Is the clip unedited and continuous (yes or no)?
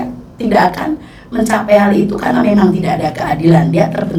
yes